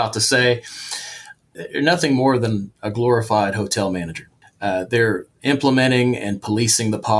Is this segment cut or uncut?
cut